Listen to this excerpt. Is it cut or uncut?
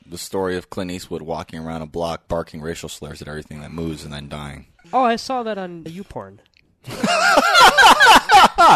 cut